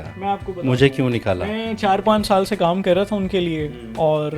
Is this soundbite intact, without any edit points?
yes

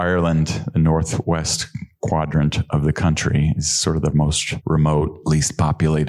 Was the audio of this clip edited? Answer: yes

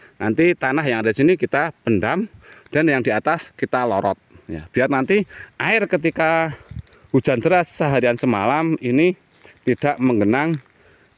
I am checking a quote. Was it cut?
no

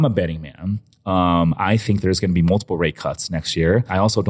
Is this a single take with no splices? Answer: yes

